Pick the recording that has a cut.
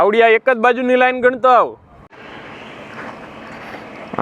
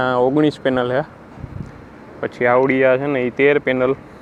first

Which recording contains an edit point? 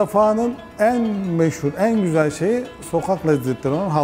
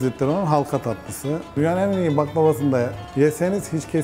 second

